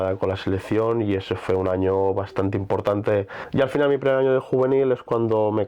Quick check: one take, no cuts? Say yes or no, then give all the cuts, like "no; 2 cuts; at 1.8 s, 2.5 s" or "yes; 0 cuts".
no; 1 cut; at 3.4 s